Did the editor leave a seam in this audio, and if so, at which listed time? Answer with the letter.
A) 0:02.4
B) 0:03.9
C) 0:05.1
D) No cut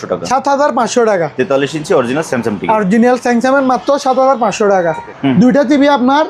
C